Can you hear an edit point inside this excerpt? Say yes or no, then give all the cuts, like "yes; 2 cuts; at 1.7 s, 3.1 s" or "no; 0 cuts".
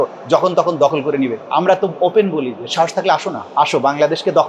yes; 2 cuts; at 1.4 s, 3.4 s